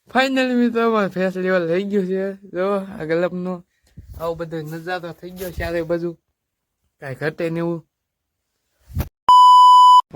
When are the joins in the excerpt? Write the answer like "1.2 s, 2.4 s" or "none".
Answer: 9.1 s